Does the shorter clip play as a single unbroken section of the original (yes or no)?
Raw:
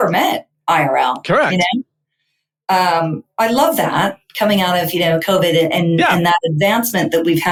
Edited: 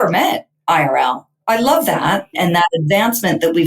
no